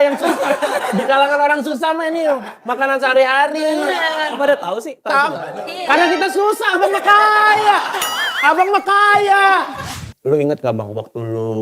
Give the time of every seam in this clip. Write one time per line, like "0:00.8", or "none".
0:10.0